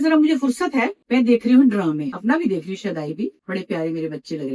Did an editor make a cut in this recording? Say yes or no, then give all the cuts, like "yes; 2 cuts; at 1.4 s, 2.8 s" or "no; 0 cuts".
yes; 3 cuts; at 1.0 s, 2.1 s, 3.4 s